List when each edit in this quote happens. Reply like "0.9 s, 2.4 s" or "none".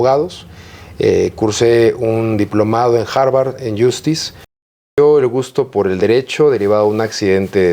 4.6 s